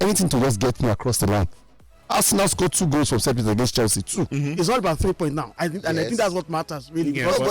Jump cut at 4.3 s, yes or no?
yes